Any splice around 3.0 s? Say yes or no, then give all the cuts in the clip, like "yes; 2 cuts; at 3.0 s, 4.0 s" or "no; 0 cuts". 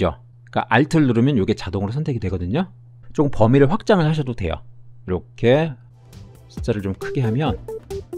yes; 1 cut; at 3.0 s